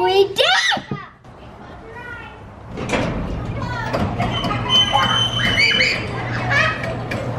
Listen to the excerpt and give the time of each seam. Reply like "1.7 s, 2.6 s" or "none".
none